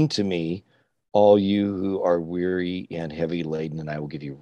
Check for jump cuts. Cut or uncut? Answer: uncut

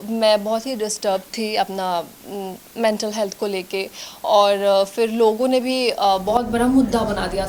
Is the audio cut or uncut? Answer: uncut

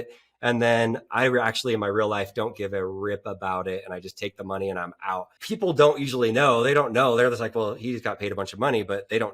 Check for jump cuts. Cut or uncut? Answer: cut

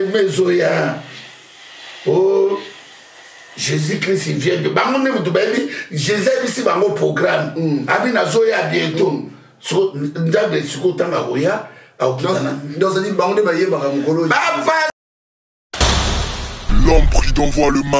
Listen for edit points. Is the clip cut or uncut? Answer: cut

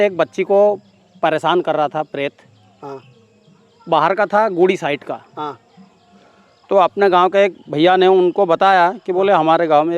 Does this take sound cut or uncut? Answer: uncut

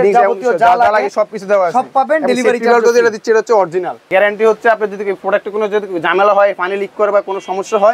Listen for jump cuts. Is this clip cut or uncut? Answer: cut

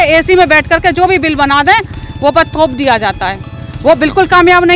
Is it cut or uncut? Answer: uncut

